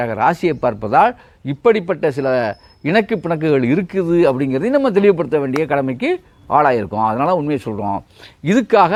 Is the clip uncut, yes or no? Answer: yes